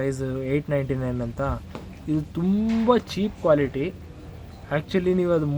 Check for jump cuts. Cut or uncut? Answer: uncut